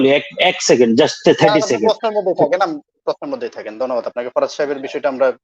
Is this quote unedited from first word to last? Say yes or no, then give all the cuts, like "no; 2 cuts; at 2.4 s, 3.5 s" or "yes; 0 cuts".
yes; 0 cuts